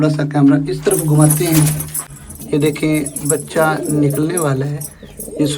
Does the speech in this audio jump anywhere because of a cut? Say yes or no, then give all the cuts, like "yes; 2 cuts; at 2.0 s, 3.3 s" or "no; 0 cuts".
yes; 1 cut; at 1.9 s